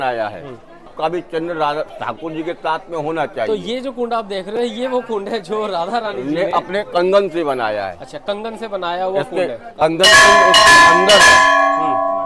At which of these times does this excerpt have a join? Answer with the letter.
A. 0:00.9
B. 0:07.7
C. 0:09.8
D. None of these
A